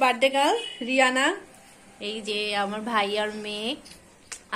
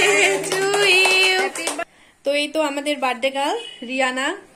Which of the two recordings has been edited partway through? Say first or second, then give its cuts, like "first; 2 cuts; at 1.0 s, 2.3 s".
second; 1 cut; at 1.8 s